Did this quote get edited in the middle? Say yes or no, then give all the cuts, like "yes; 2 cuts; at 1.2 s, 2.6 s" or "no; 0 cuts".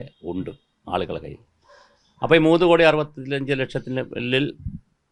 no; 0 cuts